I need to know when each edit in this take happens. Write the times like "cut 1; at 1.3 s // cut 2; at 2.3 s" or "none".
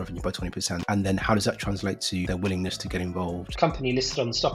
cut 1; at 3.5 s